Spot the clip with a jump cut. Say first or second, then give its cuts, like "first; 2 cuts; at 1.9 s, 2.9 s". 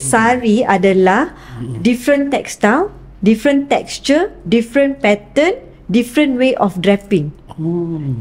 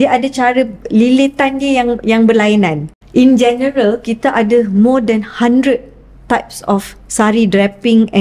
second; 1 cut; at 3.0 s